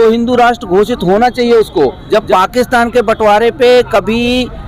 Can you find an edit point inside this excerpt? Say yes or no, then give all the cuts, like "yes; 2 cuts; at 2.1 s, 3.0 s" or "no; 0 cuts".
yes; 1 cut; at 2.0 s